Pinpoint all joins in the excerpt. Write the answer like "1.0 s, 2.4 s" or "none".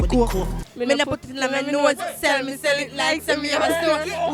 none